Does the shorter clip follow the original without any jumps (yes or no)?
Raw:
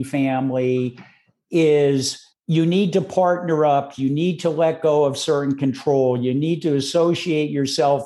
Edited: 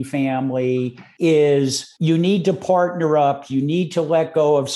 no